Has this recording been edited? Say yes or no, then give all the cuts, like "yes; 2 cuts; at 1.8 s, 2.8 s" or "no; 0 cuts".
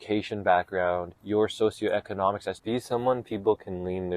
yes; 2 cuts; at 1.1 s, 2.5 s